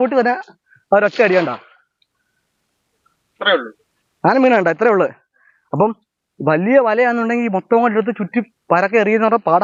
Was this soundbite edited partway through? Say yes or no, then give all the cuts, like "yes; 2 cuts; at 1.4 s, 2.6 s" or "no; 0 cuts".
no; 0 cuts